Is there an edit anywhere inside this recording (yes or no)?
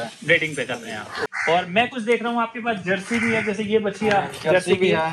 yes